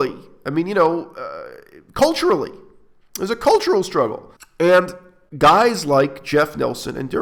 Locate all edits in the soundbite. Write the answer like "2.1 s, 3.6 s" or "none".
none